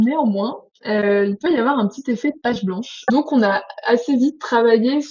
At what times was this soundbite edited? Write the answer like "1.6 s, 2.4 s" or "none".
3.1 s